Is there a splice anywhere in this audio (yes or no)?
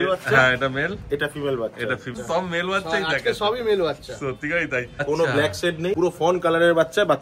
yes